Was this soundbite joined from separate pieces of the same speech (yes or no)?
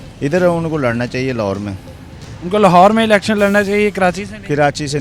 no